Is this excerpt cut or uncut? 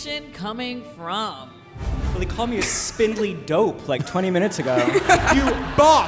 cut